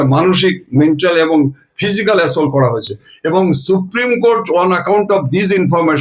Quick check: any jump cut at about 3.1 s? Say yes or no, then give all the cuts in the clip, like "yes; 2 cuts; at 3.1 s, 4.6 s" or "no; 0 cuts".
no; 0 cuts